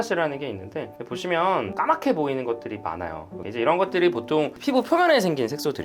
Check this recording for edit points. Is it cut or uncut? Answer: cut